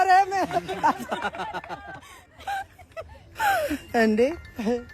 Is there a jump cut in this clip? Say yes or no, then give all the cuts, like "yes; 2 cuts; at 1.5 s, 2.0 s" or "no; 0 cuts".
no; 0 cuts